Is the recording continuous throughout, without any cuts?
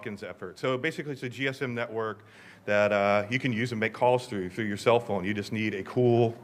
no; 1 cut; at 5.4 s

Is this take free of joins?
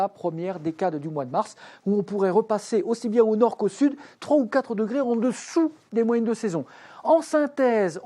yes; 0 cuts

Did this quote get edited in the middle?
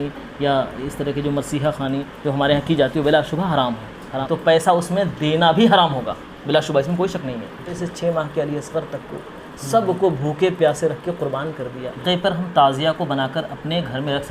yes; 3 cuts; at 4.2 s, 7.7 s, 12.0 s

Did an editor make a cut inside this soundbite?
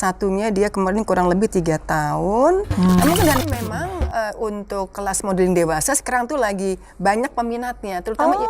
yes; 1 cut; at 3.4 s

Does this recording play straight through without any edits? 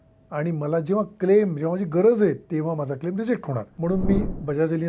no; 1 cut; at 3.7 s

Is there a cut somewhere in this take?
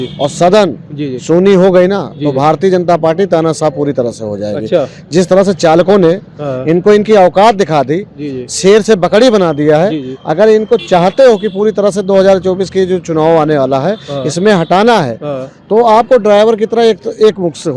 no; 0 cuts

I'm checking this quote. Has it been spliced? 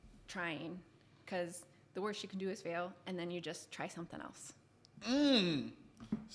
no; 0 cuts

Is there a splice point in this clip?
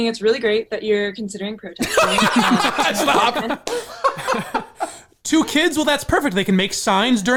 no; 0 cuts

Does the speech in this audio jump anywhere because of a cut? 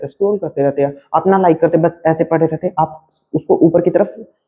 no; 0 cuts

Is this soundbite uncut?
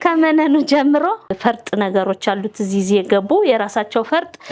no; 1 cut; at 1.3 s

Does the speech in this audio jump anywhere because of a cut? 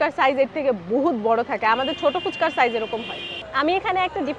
yes; 1 cut; at 3.4 s

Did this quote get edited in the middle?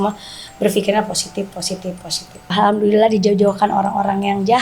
yes; 1 cut; at 2.5 s

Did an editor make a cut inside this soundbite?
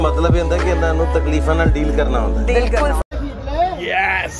yes; 1 cut; at 3.0 s

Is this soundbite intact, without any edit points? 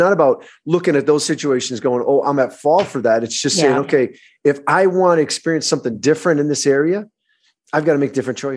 yes; 0 cuts

